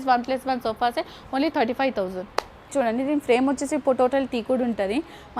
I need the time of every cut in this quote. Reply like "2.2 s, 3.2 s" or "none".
2.7 s